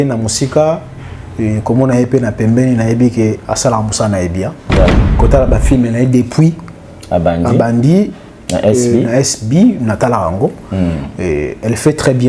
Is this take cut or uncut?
cut